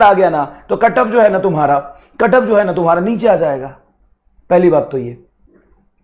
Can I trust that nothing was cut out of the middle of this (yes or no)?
yes